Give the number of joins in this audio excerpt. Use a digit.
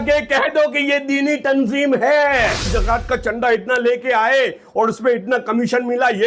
1